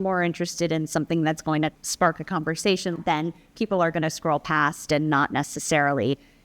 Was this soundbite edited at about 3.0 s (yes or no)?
yes